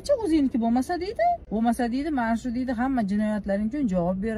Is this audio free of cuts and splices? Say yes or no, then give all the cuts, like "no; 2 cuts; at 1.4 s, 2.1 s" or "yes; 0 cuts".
no; 1 cut; at 1.4 s